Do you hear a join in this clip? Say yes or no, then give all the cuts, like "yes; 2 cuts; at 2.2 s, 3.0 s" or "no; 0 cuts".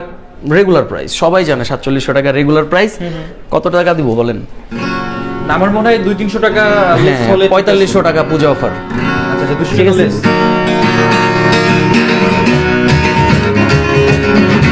no; 0 cuts